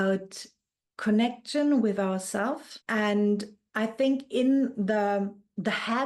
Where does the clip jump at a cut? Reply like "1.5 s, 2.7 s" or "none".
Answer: 2.7 s